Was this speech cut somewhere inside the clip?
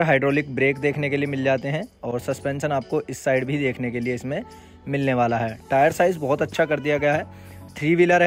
no; 0 cuts

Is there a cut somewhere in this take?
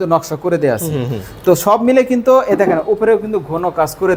no; 0 cuts

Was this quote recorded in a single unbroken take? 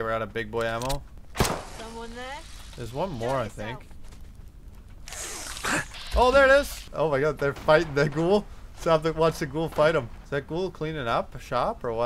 no; 3 cuts; at 1.2 s, 6.8 s, 10.2 s

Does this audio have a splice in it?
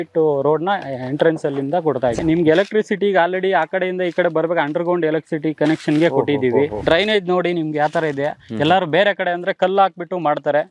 yes; 2 cuts; at 2.1 s, 6.8 s

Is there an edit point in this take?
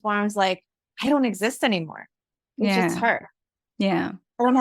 no; 0 cuts

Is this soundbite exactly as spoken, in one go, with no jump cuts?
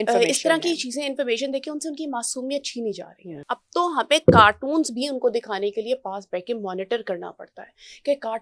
no; 1 cut; at 3.5 s

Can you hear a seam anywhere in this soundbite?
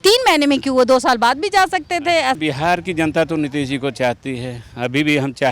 yes; 1 cut; at 2.4 s

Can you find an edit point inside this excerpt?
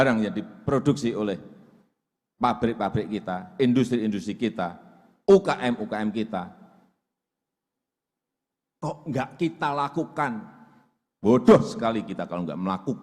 no; 0 cuts

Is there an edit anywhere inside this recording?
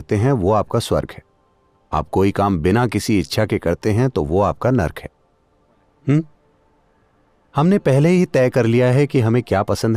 no; 0 cuts

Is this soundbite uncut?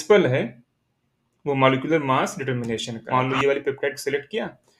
no; 1 cut; at 2.9 s

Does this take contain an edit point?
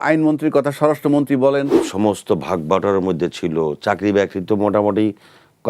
yes; 1 cut; at 1.8 s

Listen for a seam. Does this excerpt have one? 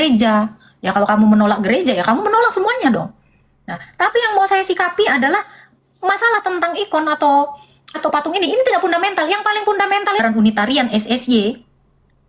yes; 1 cut; at 10.2 s

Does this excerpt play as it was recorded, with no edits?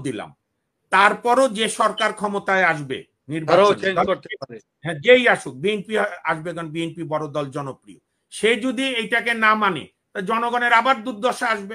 yes; 0 cuts

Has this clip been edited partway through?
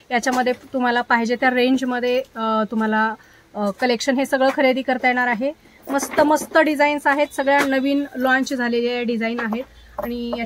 no; 0 cuts

